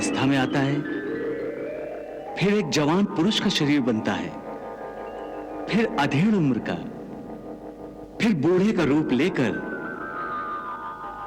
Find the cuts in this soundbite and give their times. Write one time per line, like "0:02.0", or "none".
none